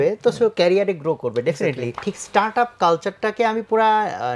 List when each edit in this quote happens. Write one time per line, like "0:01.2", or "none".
0:02.0